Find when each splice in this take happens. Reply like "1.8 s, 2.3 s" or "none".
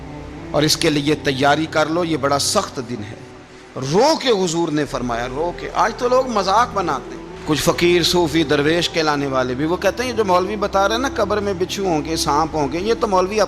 none